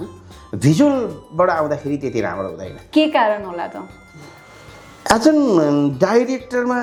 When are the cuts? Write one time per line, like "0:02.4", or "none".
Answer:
none